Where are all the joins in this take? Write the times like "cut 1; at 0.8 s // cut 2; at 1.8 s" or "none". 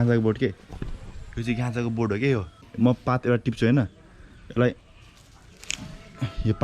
cut 1; at 2.7 s